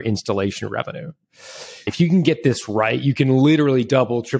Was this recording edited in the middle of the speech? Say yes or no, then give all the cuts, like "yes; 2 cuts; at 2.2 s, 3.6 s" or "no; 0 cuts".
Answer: yes; 1 cut; at 1.9 s